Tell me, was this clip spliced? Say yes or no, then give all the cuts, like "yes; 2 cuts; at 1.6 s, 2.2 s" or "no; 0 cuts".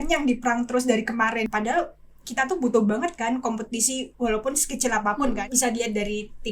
yes; 2 cuts; at 1.5 s, 5.4 s